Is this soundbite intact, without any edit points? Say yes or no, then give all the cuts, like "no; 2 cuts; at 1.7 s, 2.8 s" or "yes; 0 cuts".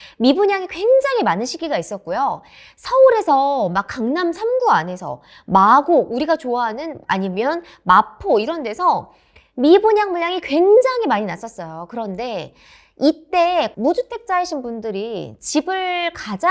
no; 1 cut; at 13.7 s